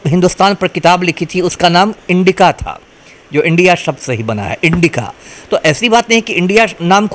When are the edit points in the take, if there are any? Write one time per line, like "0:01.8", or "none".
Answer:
none